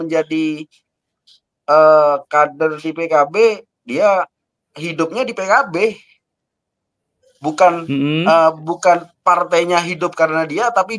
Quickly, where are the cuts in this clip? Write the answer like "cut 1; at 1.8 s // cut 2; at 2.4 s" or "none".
none

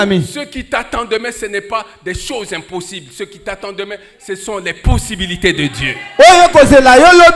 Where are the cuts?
none

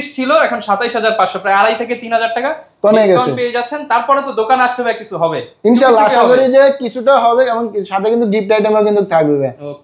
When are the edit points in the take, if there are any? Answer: none

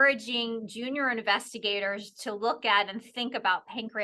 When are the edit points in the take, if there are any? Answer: none

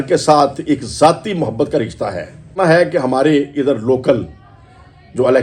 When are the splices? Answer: cut 1; at 2.5 s

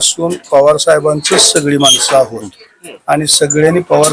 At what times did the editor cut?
none

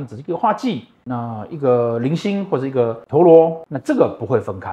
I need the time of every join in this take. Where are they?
none

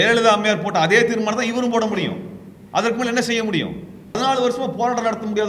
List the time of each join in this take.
cut 1; at 4.2 s

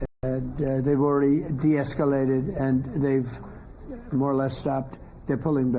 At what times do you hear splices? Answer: none

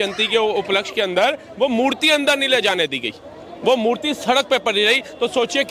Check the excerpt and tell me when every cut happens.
none

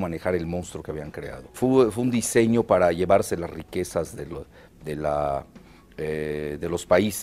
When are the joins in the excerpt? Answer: cut 1; at 1.1 s

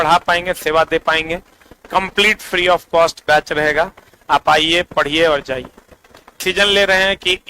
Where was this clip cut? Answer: cut 1; at 6.4 s

